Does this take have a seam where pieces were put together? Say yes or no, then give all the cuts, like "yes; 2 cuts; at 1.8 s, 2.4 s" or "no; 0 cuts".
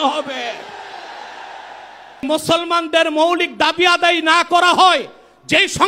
yes; 1 cut; at 2.2 s